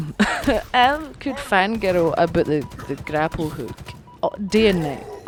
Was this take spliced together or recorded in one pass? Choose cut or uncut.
uncut